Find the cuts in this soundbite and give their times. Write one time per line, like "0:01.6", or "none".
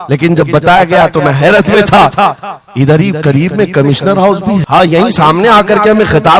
0:04.7